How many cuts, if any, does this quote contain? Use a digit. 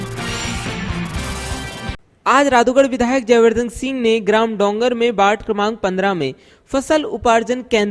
1